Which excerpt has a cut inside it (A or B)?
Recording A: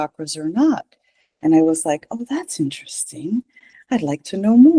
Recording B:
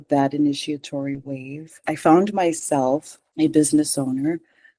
B